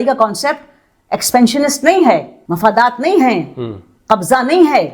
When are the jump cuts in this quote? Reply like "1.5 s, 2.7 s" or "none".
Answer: 2.4 s